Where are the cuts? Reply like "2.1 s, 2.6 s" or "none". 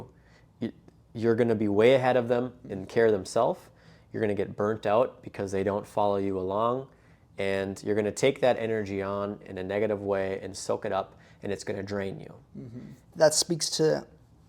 13.0 s